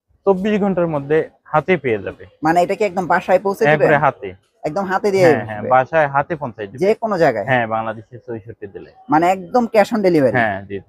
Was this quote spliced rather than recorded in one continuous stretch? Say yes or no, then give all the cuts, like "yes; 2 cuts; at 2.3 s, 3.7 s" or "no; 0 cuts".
no; 0 cuts